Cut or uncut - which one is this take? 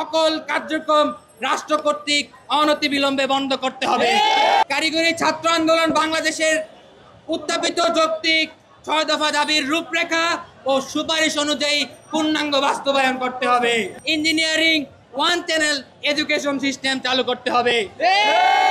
cut